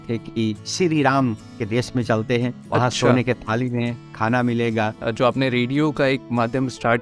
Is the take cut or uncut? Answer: cut